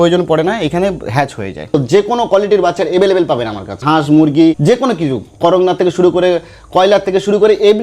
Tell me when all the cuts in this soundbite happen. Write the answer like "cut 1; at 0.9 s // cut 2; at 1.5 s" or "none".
cut 1; at 1.7 s // cut 2; at 3.8 s // cut 3; at 4.6 s

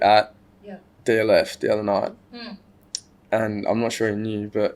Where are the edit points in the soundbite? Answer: none

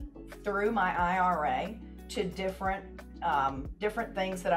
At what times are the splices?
none

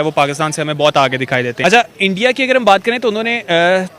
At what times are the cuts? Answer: cut 1; at 1.5 s

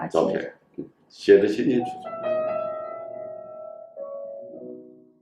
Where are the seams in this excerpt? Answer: cut 1; at 2.0 s

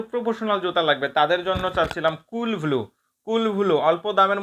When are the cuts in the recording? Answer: none

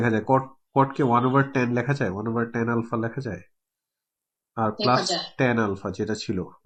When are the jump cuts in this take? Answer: none

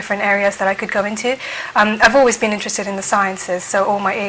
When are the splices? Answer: cut 1; at 2.3 s

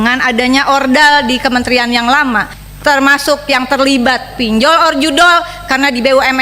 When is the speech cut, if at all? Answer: cut 1; at 2.6 s

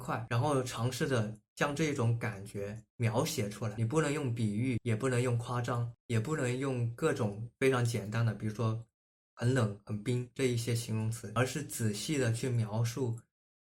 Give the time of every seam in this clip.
none

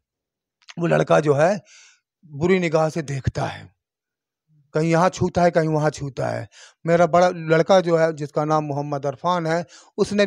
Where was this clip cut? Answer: none

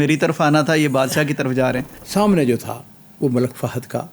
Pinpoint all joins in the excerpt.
cut 1; at 1.9 s

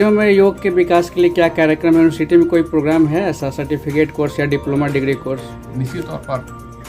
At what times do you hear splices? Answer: cut 1; at 5.6 s

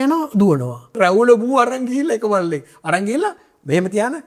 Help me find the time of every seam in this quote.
cut 1; at 1.0 s

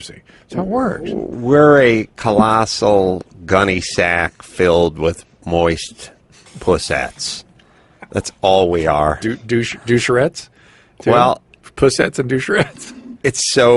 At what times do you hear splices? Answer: cut 1; at 2.1 s

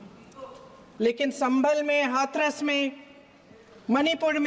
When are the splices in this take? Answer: none

